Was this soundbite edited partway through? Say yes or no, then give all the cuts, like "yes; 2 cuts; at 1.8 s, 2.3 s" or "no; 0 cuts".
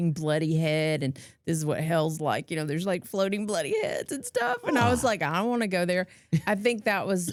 no; 0 cuts